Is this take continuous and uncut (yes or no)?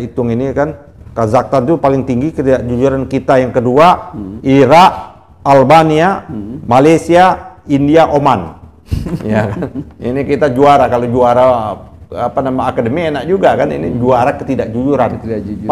yes